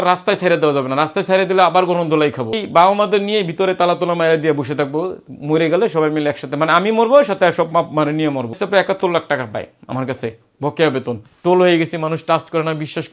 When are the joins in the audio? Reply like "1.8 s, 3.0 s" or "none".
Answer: 2.6 s, 8.5 s, 11.3 s